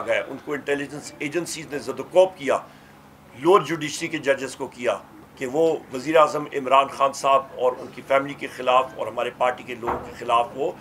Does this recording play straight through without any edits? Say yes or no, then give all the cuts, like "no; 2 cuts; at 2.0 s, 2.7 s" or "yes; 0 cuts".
no; 1 cut; at 5.1 s